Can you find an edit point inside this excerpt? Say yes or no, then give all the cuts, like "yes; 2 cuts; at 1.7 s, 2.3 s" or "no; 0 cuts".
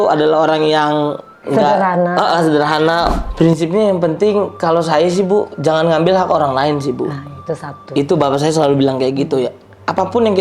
yes; 1 cut; at 3.2 s